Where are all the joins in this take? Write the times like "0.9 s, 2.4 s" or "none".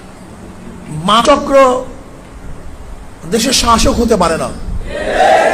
1.2 s